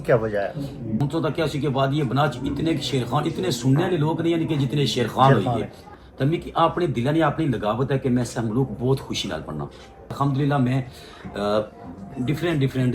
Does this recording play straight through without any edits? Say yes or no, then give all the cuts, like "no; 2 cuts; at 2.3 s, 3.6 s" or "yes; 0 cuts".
no; 3 cuts; at 1.0 s, 5.8 s, 10.1 s